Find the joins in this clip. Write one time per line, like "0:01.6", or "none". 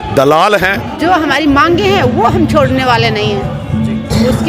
0:00.9